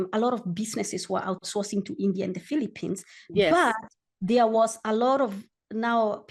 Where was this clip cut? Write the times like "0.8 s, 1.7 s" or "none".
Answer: none